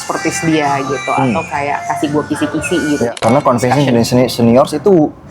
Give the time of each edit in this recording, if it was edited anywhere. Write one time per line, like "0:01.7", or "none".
0:03.1